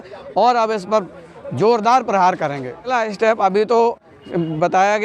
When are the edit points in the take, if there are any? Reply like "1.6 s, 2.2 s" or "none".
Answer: none